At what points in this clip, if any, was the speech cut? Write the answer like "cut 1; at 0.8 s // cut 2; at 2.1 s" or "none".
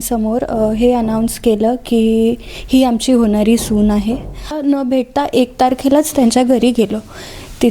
cut 1; at 4.6 s